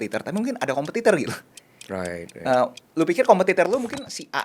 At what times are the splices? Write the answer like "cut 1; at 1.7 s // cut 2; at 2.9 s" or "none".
none